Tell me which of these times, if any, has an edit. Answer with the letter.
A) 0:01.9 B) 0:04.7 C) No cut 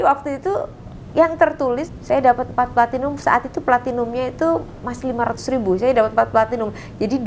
A